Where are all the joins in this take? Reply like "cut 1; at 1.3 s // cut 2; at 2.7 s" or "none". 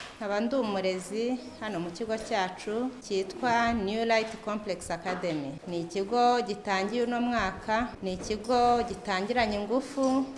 cut 1; at 3.0 s // cut 2; at 5.6 s // cut 3; at 8.0 s